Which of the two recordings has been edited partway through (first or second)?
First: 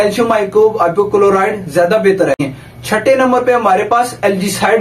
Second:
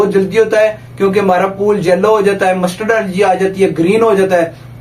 first